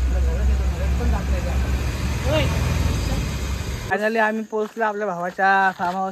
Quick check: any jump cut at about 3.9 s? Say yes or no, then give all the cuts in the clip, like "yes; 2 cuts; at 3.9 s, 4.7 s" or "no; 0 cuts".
yes; 1 cut; at 3.9 s